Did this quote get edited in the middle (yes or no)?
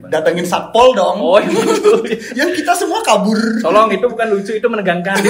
no